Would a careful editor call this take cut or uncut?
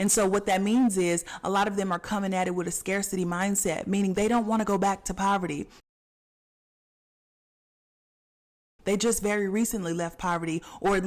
uncut